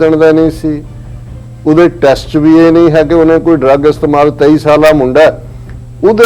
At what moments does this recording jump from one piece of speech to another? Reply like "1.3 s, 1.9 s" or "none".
none